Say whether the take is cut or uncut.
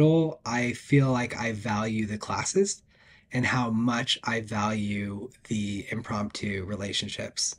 uncut